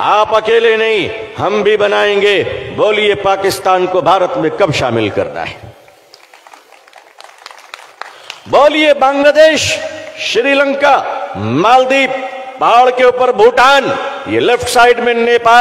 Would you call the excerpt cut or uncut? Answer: uncut